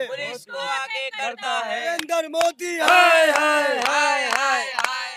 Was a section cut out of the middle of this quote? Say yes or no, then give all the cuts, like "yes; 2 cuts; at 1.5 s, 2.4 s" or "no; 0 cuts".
no; 0 cuts